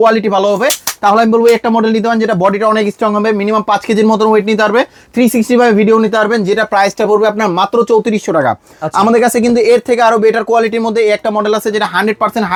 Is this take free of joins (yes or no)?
yes